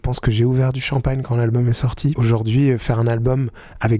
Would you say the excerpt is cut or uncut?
cut